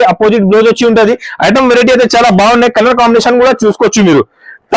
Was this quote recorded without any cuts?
yes; 0 cuts

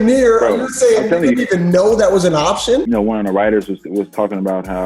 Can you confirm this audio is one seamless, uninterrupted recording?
no; 1 cut; at 2.9 s

